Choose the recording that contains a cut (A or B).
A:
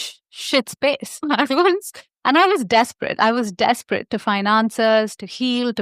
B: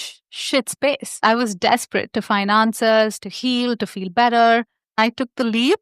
B